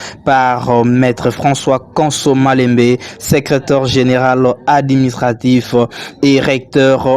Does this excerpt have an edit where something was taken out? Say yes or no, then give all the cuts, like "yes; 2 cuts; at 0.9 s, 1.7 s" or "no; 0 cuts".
no; 0 cuts